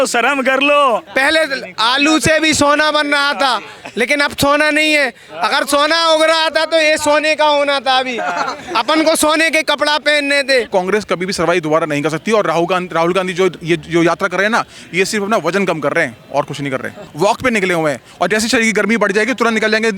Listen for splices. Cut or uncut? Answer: cut